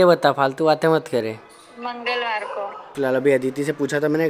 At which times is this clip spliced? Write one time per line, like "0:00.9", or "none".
0:02.9